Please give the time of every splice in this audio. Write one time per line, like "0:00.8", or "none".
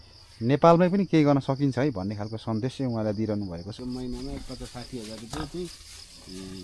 0:03.7